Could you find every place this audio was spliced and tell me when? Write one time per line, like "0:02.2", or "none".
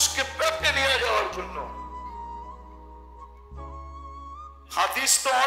none